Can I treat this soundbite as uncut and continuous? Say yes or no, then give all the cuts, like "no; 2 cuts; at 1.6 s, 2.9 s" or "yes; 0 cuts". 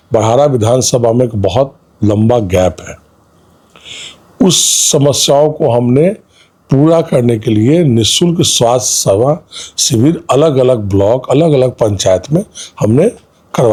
yes; 0 cuts